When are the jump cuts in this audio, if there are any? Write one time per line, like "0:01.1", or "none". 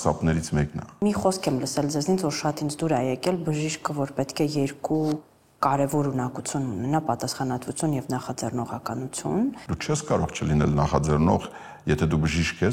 0:01.0
0:09.6